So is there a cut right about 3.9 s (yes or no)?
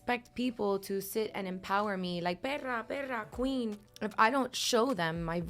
yes